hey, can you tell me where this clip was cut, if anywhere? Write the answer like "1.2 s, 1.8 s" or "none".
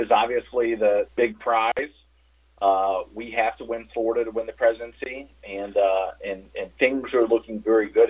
1.1 s